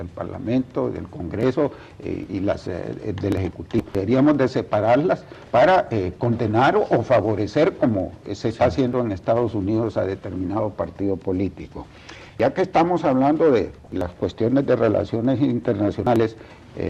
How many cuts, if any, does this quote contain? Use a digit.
0